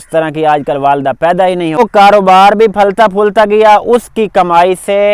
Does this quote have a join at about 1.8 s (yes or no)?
yes